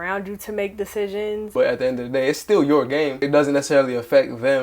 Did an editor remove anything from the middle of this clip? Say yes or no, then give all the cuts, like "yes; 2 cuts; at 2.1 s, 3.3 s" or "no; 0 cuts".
yes; 2 cuts; at 1.5 s, 3.2 s